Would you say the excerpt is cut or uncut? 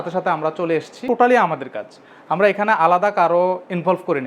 cut